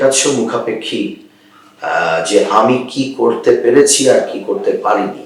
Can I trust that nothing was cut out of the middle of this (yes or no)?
yes